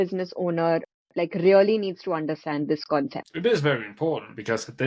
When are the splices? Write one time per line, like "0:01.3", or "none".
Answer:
none